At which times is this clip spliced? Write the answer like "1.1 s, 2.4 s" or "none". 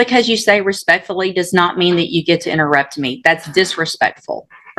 none